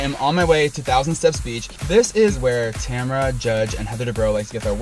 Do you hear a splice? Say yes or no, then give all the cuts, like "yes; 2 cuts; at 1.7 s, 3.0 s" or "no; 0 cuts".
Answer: no; 0 cuts